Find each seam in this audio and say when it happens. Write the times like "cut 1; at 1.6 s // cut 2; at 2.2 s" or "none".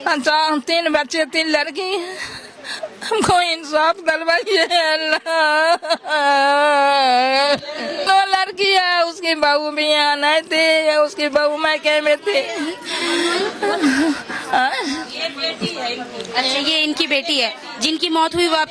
none

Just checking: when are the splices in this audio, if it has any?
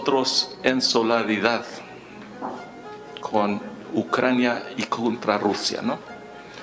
none

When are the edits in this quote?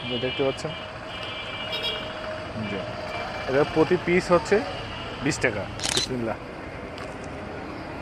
cut 1; at 5.8 s

